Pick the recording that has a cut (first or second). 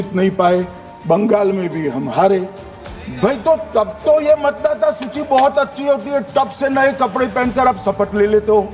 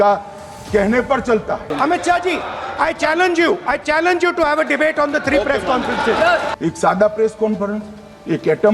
second